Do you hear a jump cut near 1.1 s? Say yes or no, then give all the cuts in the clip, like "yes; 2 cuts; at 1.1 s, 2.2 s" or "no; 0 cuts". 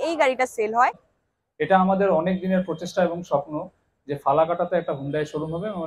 yes; 1 cut; at 1.1 s